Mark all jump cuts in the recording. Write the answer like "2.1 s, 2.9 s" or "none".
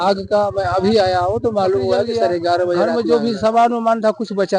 2.9 s